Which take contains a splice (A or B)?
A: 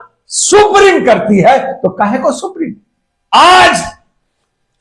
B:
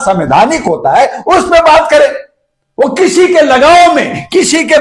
A